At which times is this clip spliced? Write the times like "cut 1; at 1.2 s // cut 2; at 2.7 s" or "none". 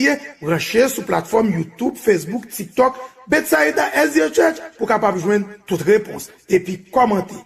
none